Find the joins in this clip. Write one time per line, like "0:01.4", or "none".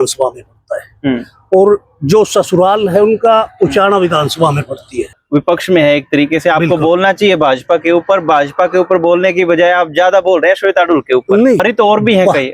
0:05.1
0:11.6